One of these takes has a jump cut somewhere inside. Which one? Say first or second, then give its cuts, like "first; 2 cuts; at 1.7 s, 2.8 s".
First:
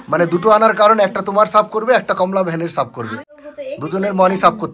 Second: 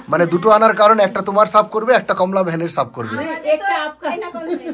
first; 1 cut; at 3.2 s